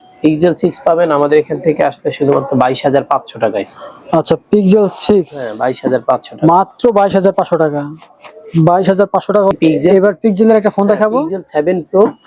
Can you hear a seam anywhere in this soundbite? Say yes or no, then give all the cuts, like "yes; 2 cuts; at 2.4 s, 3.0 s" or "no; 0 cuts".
yes; 1 cut; at 9.5 s